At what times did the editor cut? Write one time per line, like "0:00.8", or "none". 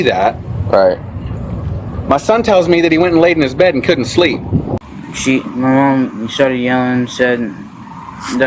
0:04.8